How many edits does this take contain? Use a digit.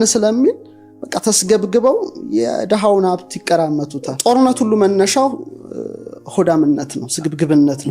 1